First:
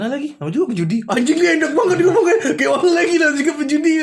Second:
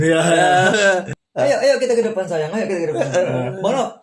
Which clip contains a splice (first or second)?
second